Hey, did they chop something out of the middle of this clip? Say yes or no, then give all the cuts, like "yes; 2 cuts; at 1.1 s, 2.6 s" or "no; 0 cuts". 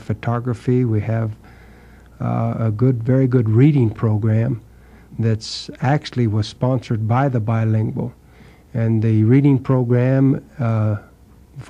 no; 0 cuts